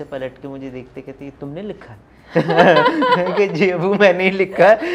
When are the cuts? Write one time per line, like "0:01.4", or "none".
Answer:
none